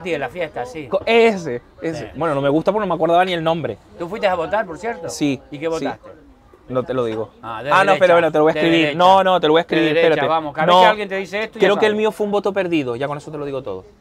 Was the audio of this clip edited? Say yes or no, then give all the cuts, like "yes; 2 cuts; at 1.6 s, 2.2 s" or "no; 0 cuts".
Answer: no; 0 cuts